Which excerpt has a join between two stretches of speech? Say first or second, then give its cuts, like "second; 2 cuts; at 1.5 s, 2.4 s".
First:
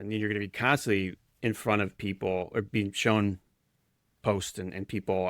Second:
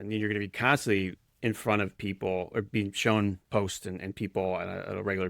second; 1 cut; at 3.4 s